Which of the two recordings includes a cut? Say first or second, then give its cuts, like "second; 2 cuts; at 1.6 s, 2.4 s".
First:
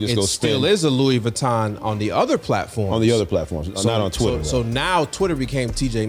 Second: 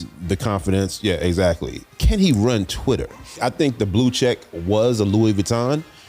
second; 2 cuts; at 1.8 s, 3.4 s